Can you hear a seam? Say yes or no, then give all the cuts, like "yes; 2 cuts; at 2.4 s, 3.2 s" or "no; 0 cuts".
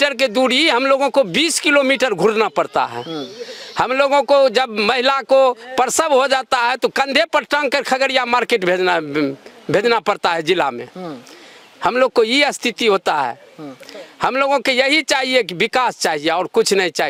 no; 0 cuts